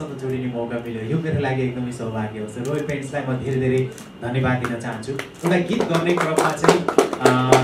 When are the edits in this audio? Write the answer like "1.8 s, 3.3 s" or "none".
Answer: none